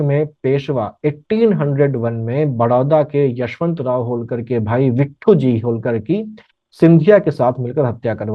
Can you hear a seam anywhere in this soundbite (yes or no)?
no